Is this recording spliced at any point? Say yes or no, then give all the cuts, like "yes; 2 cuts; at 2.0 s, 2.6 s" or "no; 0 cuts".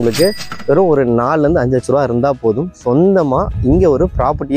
no; 0 cuts